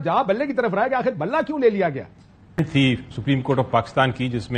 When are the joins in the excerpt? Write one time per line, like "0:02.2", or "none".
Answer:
0:02.6